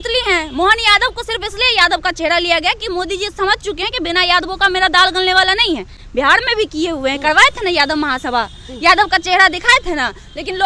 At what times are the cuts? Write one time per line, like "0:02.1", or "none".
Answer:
none